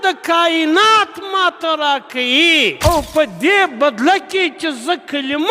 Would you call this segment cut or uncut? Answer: cut